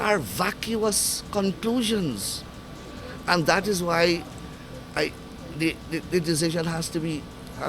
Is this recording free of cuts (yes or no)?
yes